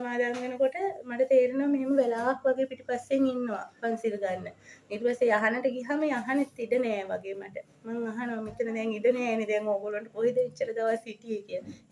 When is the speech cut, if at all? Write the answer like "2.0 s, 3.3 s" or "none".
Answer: none